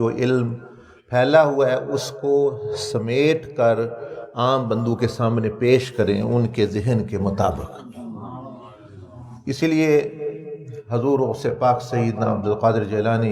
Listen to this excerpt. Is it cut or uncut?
uncut